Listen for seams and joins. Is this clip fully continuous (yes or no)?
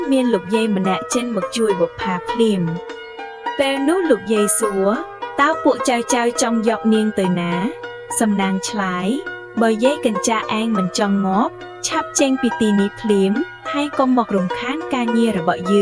yes